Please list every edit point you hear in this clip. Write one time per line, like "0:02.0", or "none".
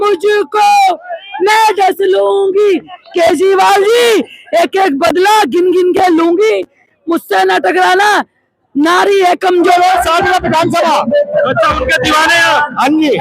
0:09.7

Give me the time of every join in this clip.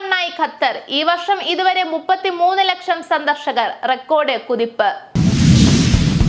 0:05.0

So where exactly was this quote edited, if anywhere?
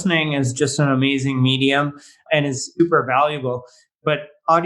0:02.7

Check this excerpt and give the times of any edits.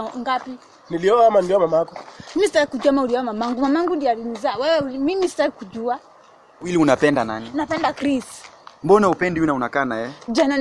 0:06.7

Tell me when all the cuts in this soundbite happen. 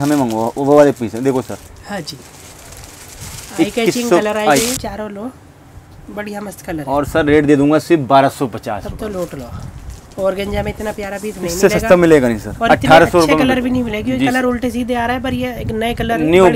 0:04.8

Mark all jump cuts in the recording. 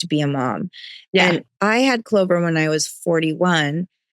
0:01.5

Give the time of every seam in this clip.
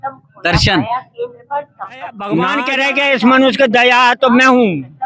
0:02.7

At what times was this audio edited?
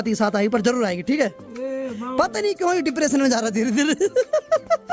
none

